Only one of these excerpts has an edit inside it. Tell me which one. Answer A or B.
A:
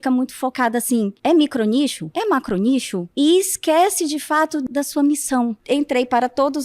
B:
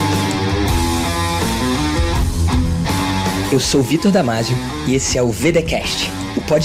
A